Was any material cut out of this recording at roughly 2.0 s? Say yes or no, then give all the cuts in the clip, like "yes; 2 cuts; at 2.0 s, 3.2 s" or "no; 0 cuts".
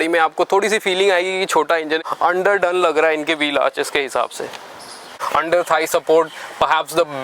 yes; 2 cuts; at 2.0 s, 5.2 s